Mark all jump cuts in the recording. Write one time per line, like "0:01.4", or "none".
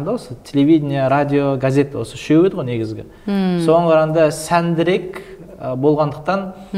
none